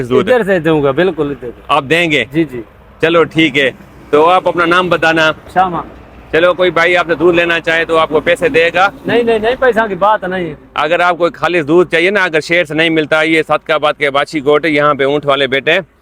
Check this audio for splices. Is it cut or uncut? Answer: uncut